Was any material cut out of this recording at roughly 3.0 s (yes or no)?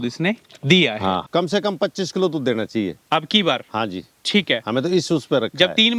no